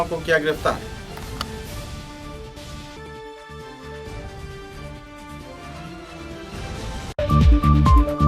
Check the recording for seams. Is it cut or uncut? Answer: cut